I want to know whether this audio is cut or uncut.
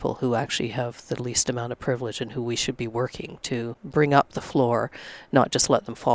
cut